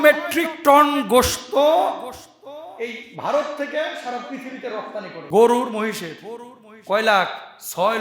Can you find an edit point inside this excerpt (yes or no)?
yes